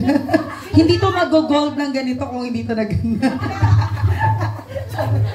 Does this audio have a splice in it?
no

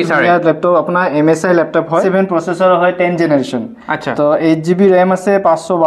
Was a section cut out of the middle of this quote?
yes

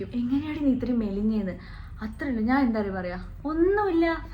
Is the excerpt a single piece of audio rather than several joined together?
yes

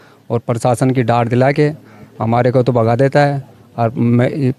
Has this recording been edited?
no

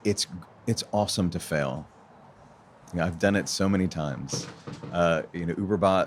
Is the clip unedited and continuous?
yes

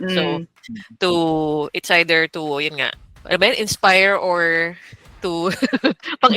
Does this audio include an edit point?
yes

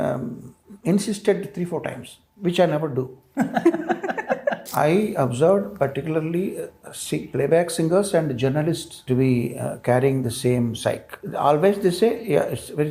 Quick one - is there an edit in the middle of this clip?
yes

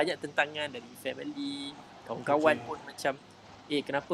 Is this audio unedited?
yes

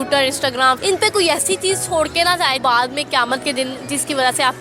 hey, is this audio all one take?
no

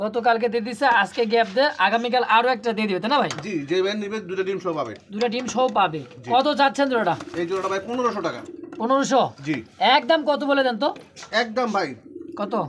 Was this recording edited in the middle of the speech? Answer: no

